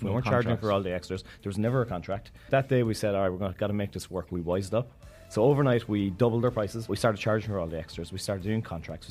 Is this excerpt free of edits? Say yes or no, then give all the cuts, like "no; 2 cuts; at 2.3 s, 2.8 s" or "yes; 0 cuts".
no; 2 cuts; at 2.4 s, 6.9 s